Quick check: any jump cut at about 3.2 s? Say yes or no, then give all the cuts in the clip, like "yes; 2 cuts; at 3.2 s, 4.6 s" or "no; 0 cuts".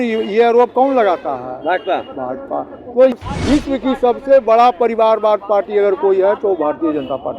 yes; 1 cut; at 3.2 s